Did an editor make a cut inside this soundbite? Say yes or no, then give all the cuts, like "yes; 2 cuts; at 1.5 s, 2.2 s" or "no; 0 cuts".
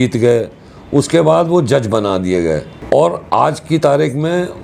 no; 0 cuts